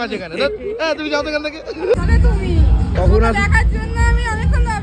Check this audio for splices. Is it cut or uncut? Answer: cut